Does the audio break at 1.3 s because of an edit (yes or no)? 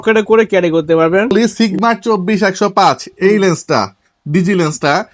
yes